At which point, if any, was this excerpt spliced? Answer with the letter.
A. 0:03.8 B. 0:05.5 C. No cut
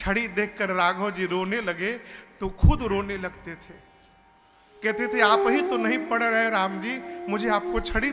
C